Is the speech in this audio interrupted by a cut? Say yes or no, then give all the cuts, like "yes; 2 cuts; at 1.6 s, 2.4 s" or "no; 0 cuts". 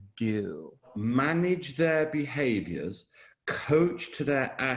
yes; 1 cut; at 0.9 s